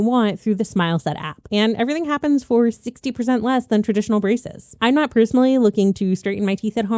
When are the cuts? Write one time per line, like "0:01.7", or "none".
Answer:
none